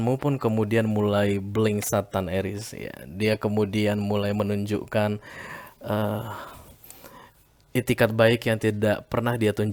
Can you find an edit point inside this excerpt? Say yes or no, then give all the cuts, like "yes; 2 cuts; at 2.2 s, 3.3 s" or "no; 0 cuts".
no; 0 cuts